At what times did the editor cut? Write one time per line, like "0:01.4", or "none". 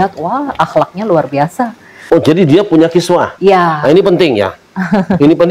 0:01.9

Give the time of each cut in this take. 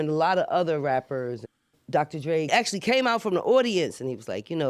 0:01.4
0:02.5

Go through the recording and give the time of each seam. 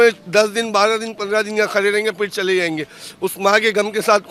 none

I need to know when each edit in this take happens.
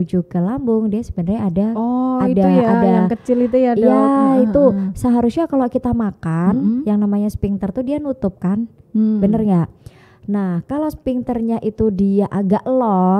none

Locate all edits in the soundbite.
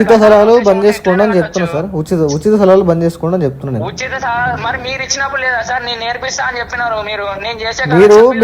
none

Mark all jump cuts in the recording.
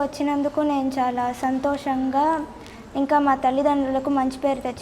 none

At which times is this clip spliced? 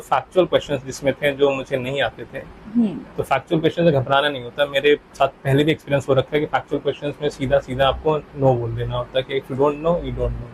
none

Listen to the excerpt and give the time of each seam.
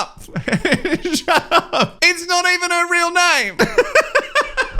0:02.0
0:03.5

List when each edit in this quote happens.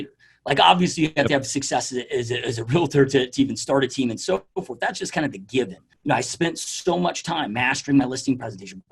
0:05.9

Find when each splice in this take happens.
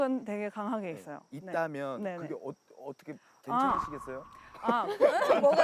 none

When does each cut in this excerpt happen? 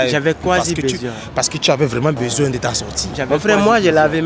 0:03.3

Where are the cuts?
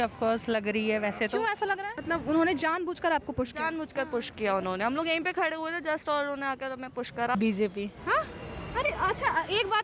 0:01.9
0:07.3

